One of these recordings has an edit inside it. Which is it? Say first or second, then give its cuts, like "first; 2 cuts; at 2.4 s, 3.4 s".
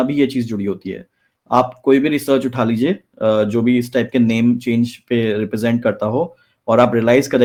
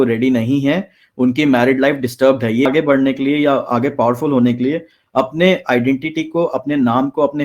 second; 1 cut; at 2.7 s